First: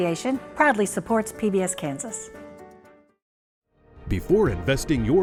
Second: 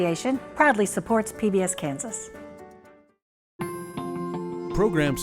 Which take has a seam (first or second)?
second